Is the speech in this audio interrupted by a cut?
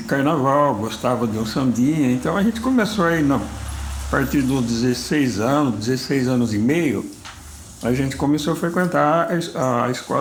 no; 0 cuts

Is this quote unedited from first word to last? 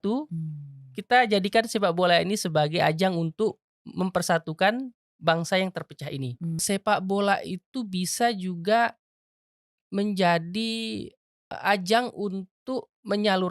no; 2 cuts; at 6.6 s, 11.5 s

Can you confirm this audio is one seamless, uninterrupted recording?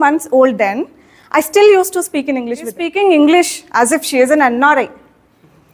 no; 1 cut; at 2.8 s

